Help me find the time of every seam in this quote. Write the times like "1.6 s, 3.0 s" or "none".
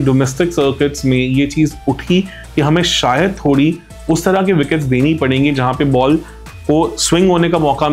none